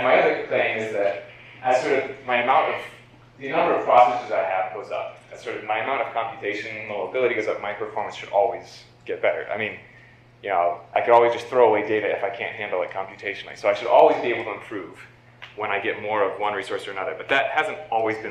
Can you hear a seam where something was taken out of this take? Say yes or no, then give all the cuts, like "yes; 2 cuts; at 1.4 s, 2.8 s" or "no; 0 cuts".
yes; 1 cut; at 11.8 s